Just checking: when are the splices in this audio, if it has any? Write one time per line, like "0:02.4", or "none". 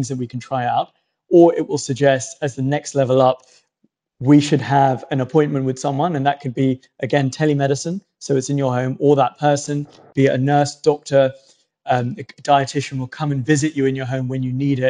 none